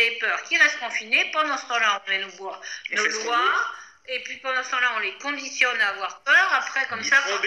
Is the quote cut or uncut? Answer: uncut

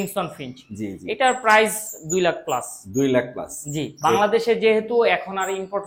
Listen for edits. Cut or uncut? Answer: uncut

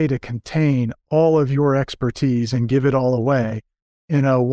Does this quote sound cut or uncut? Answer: uncut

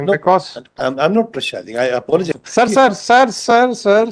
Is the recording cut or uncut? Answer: cut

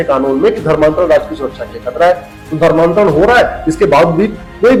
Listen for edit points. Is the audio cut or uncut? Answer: uncut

